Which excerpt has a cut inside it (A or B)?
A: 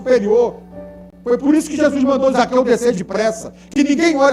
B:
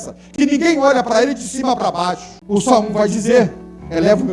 B